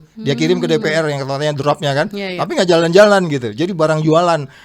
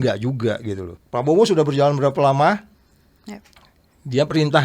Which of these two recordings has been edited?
second; 1 cut; at 0.9 s

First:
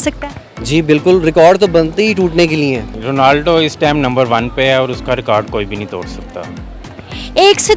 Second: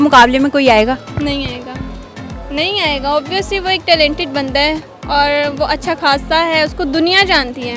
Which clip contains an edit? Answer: first; 1 cut; at 2.9 s

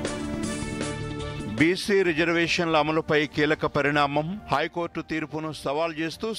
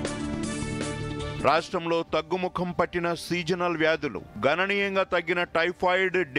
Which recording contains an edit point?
first; 1 cut; at 1.4 s

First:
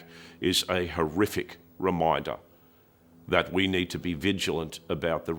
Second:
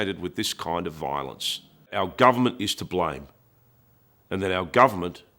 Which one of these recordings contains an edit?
second; 1 cut; at 1.9 s

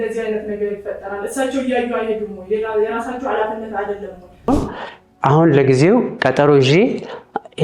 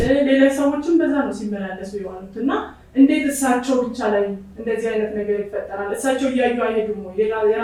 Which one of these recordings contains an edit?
first; 1 cut; at 4.5 s

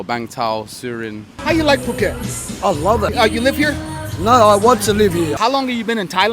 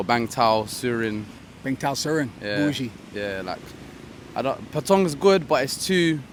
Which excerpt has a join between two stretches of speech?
first; 2 cuts; at 1.3 s, 5.3 s

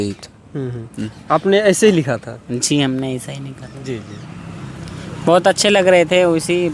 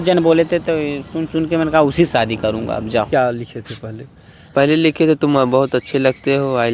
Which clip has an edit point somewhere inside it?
second; 1 cut; at 3.1 s

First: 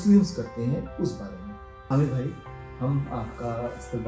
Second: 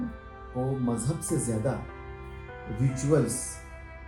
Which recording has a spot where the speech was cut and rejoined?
first; 1 cut; at 1.9 s

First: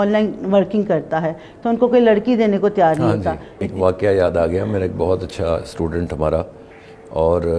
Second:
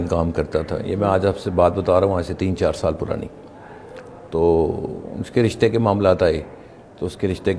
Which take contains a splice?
first; 1 cut; at 3.5 s

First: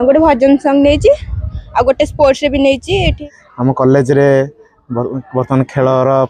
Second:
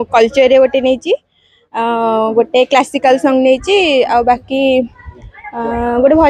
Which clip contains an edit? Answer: first; 1 cut; at 3.2 s

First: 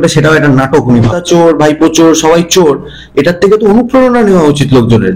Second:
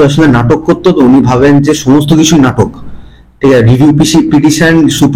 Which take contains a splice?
first; 1 cut; at 1.2 s

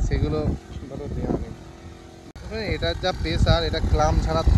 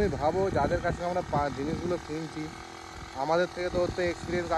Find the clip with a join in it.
first; 1 cut; at 2.3 s

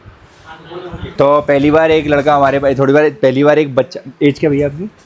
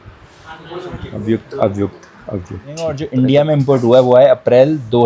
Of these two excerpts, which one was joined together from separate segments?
second; 2 cuts; at 1.1 s, 3.1 s

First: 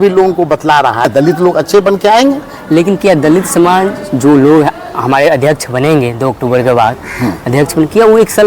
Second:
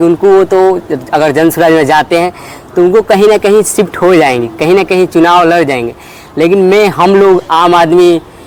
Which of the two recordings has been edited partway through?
first; 1 cut; at 1.1 s

